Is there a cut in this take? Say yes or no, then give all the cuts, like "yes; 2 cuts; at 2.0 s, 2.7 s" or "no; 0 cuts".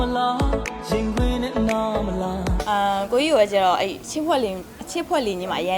yes; 1 cut; at 2.7 s